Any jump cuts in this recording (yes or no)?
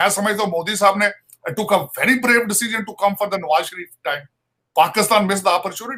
no